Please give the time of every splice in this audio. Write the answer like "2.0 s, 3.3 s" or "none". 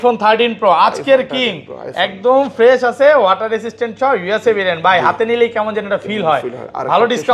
none